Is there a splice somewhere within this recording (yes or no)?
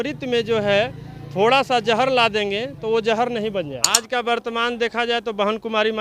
yes